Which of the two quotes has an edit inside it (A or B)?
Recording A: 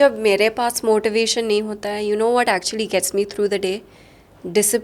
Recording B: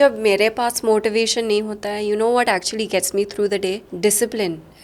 B